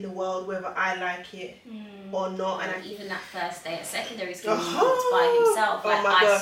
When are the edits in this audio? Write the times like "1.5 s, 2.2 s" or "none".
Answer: 2.8 s